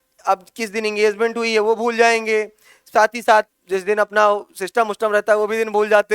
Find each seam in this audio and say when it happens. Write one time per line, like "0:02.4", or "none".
0:03.6